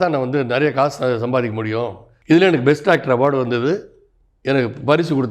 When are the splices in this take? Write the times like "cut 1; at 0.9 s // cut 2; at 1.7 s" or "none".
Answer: cut 1; at 2.2 s

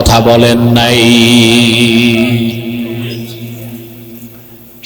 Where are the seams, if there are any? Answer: none

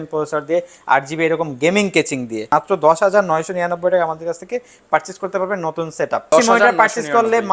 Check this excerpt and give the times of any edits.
cut 1; at 2.5 s // cut 2; at 6.2 s

